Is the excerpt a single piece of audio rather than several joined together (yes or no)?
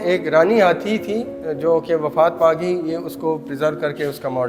yes